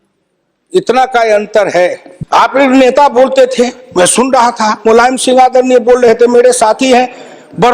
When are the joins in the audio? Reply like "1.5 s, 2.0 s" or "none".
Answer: 2.1 s